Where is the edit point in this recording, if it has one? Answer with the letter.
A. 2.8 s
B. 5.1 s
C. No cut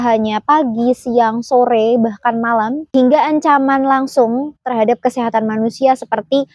A